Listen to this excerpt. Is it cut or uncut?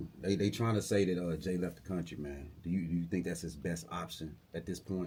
uncut